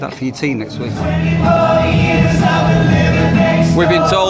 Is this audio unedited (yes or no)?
no